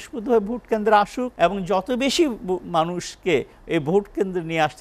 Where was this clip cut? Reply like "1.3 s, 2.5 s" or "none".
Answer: 1.2 s